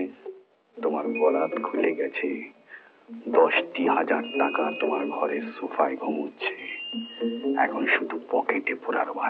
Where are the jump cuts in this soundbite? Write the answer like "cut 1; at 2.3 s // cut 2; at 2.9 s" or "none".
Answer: none

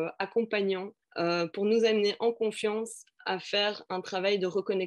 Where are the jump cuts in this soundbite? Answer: cut 1; at 1.0 s

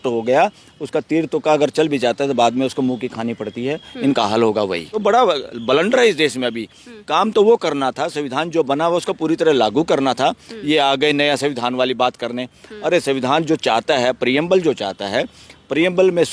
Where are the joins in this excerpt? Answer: cut 1; at 4.9 s

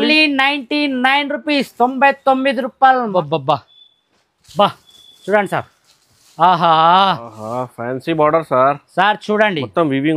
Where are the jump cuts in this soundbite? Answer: cut 1; at 3.1 s

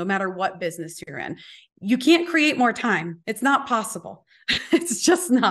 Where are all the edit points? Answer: cut 1; at 3.2 s

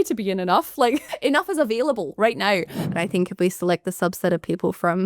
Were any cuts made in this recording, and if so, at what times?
cut 1; at 1.1 s // cut 2; at 2.9 s

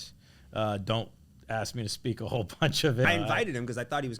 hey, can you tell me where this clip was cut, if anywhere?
cut 1; at 3.0 s

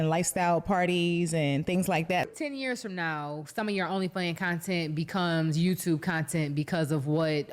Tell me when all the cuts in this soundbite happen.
cut 1; at 2.3 s

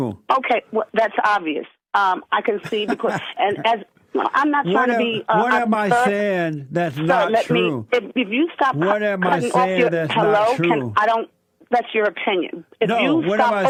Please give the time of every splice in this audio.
none

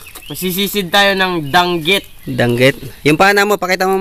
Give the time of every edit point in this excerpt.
none

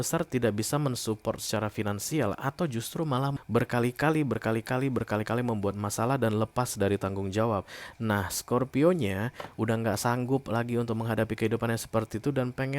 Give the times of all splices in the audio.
cut 1; at 3.3 s

